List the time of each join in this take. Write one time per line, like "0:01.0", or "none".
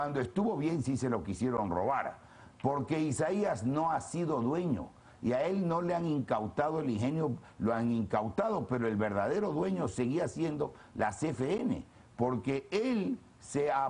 none

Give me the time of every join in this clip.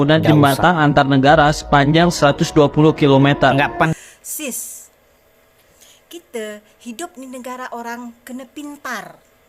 0:03.9

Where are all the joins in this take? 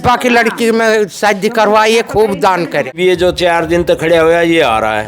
0:02.9

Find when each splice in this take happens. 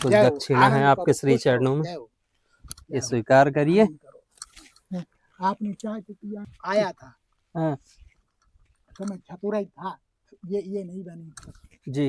0:06.4

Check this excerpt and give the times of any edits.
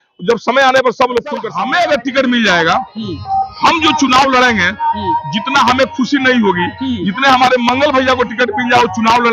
0:01.5

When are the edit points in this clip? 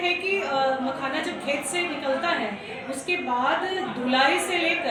none

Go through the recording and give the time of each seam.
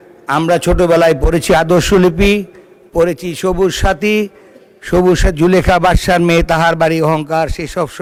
none

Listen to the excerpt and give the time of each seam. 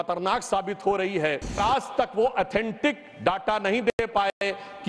0:01.6

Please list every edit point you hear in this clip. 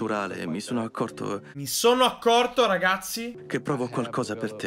0:03.4

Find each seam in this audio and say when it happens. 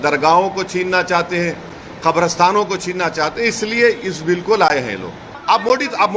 0:05.3

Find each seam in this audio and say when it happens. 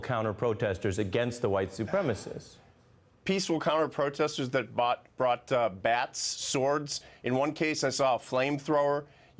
0:07.9

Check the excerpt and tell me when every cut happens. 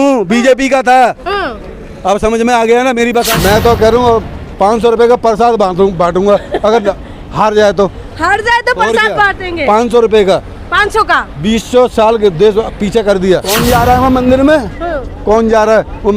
0:03.3
0:13.6

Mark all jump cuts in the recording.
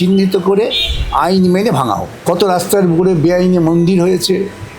0:02.1

